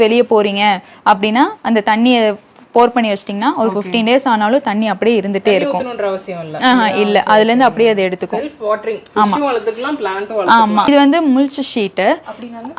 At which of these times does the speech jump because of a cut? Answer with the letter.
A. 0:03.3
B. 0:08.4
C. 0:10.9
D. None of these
C